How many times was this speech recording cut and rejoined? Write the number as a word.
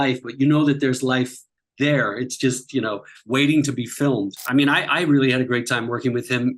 one